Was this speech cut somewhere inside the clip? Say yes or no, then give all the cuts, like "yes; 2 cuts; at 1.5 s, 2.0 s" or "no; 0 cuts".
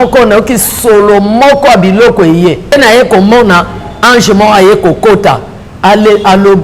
yes; 1 cut; at 2.7 s